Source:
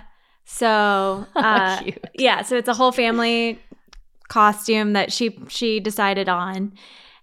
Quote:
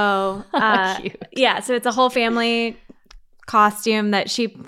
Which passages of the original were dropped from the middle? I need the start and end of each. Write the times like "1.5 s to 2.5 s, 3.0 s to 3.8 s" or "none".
none